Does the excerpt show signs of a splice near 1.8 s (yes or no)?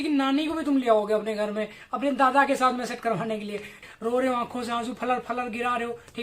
no